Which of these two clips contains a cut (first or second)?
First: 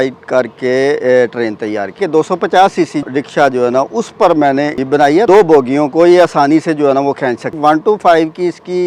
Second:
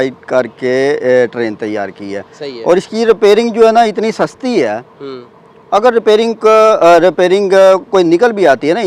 first